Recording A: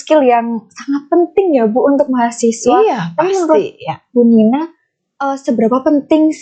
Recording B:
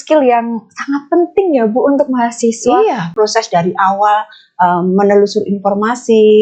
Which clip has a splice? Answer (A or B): B